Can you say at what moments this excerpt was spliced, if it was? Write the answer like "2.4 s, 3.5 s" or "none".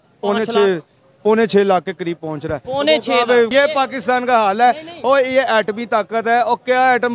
3.5 s